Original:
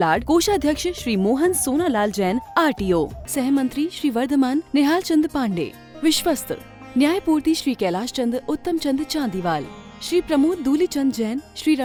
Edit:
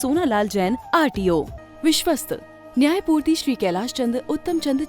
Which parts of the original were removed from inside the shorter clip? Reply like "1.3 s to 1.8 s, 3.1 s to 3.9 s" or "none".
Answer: 3.2 s to 5.8 s